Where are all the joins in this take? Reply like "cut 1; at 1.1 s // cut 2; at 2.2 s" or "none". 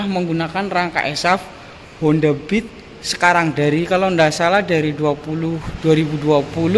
none

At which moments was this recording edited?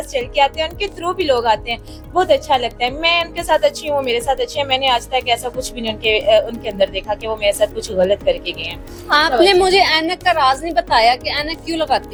none

